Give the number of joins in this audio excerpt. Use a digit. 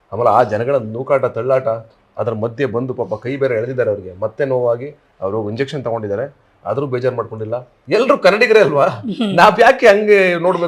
1